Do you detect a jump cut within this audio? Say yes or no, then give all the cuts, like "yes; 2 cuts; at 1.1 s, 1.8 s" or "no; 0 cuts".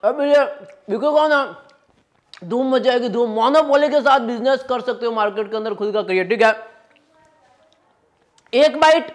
no; 0 cuts